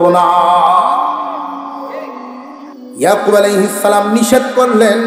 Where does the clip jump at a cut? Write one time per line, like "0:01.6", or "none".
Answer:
0:02.4

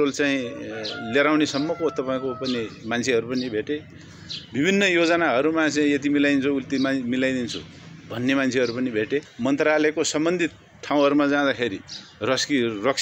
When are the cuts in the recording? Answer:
0:09.3

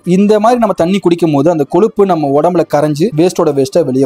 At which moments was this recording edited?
0:03.1

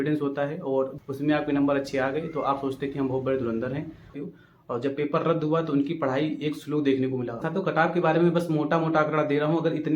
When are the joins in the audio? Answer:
0:01.0
0:04.1
0:07.3

